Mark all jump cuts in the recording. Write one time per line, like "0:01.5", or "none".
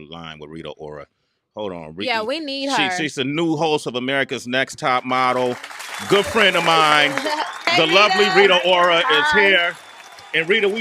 none

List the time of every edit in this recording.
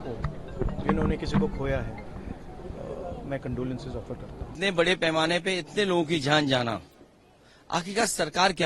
0:04.6

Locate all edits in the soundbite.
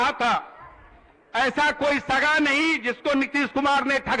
none

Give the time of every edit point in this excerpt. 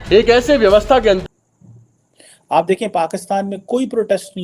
0:01.2

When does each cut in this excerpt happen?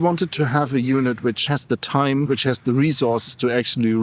0:01.4
0:02.3

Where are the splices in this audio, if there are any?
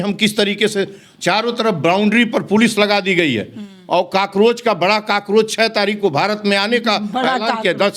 none

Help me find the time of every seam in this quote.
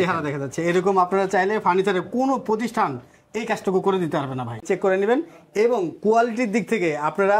0:04.6

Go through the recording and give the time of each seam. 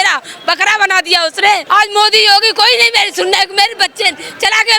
0:01.6

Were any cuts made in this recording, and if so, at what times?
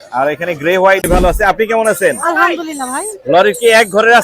0:01.1

